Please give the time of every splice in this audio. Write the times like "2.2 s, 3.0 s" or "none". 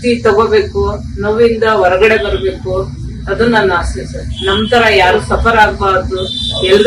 none